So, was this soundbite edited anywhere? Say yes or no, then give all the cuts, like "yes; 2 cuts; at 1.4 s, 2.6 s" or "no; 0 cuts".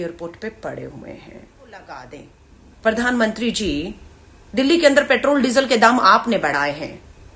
yes; 1 cut; at 2.1 s